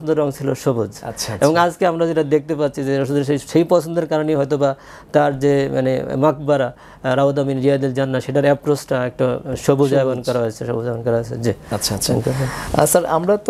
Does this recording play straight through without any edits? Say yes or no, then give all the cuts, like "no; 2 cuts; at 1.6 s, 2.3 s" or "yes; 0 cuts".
yes; 0 cuts